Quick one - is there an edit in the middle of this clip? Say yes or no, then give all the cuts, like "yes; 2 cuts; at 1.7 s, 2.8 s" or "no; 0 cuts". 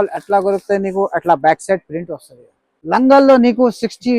yes; 1 cut; at 2.7 s